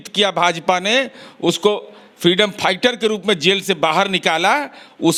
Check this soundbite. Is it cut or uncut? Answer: uncut